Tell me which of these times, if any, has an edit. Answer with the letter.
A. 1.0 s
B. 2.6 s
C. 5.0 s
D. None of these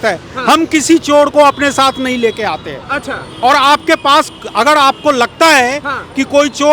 D